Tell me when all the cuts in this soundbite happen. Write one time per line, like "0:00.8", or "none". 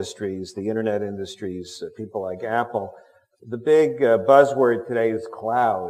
0:05.0